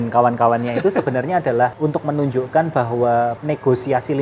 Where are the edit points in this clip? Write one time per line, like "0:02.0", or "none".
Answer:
0:01.7
0:03.4

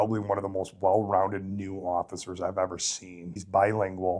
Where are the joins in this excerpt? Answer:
0:03.3

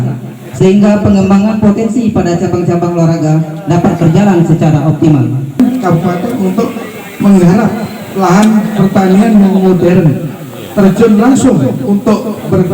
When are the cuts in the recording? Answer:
0:05.6

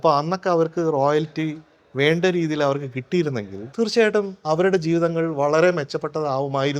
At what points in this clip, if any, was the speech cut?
0:03.6
0:04.4

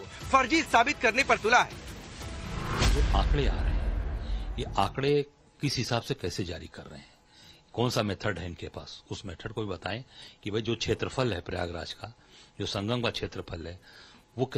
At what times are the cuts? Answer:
none

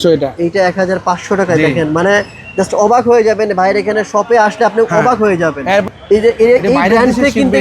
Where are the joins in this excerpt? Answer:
0:05.8

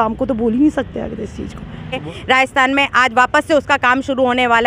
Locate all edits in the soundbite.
0:02.0

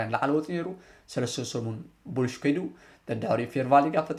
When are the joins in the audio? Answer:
none

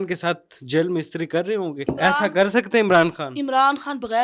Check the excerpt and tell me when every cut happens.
0:01.8

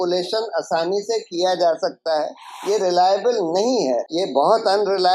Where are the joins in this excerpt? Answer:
0:04.2

